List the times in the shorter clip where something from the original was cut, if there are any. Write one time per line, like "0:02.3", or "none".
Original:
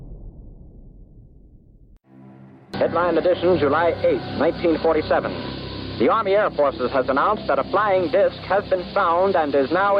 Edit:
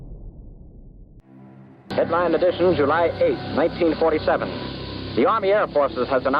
0:01.2